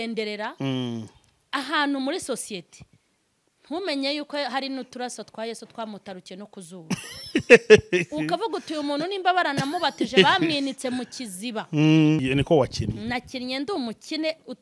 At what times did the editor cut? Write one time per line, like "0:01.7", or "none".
0:12.2